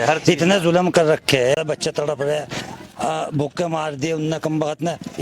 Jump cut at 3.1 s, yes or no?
no